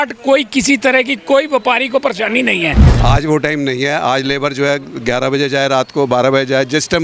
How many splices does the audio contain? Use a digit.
1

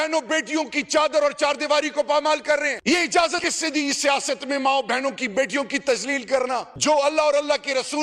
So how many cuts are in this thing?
3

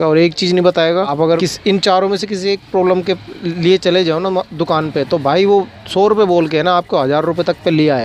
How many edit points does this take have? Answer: 1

